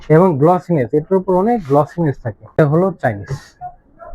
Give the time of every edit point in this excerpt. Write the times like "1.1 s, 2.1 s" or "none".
2.5 s

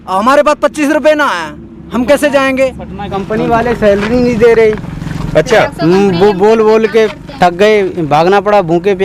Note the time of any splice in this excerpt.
3.2 s

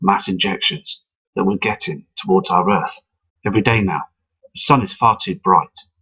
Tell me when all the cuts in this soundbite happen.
4.0 s

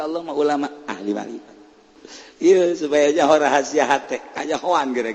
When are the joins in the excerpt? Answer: 2.0 s

